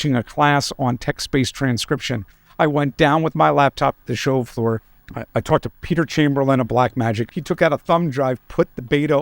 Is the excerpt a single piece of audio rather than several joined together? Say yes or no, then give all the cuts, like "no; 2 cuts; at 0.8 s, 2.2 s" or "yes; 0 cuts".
no; 2 cuts; at 5.0 s, 7.2 s